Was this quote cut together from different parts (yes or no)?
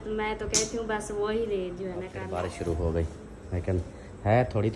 yes